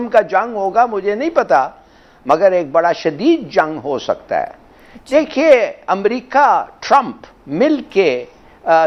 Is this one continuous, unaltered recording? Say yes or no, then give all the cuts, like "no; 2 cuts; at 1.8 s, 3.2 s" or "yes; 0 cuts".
yes; 0 cuts